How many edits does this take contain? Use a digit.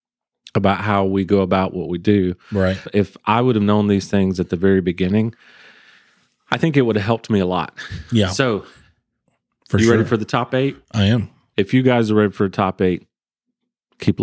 1